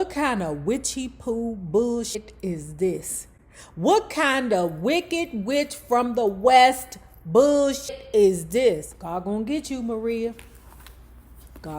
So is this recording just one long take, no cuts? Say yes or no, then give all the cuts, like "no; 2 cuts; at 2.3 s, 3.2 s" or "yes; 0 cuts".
no; 2 cuts; at 7.9 s, 8.9 s